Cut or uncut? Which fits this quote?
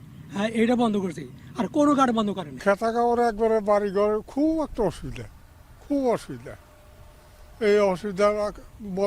cut